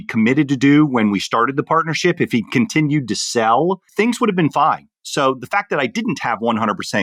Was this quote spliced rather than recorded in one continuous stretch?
no; 0 cuts

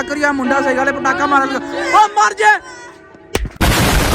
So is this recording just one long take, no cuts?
yes; 0 cuts

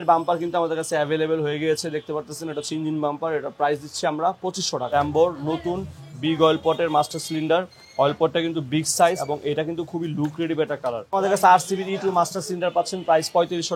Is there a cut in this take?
yes; 3 cuts; at 4.9 s, 9.2 s, 11.0 s

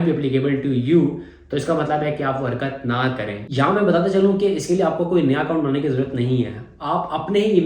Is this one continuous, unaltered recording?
no; 1 cut; at 3.4 s

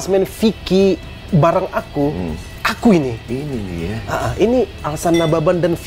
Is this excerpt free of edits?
no; 1 cut; at 2.4 s

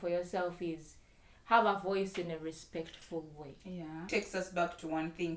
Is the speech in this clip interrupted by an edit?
yes; 1 cut; at 4.0 s

